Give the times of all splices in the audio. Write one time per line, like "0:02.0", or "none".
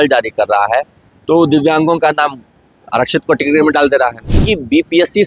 0:04.3